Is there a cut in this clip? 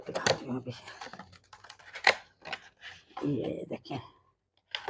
no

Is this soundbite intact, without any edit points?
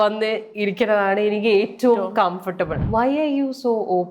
no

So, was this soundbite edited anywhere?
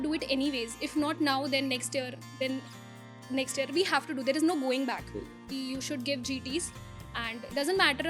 yes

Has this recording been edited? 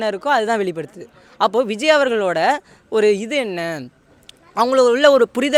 no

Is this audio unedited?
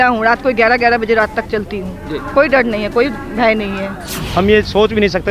no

